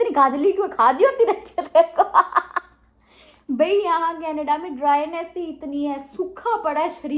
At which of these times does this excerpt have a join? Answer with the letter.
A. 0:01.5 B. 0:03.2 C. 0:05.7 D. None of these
D